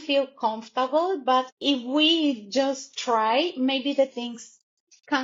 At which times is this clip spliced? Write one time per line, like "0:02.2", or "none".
0:01.5

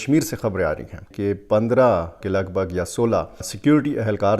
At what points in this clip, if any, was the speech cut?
0:01.0

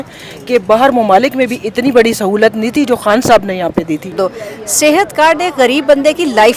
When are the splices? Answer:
0:04.1

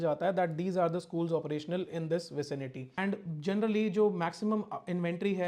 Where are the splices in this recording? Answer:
0:02.8

